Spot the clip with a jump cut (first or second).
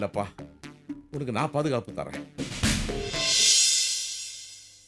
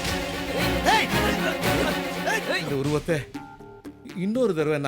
second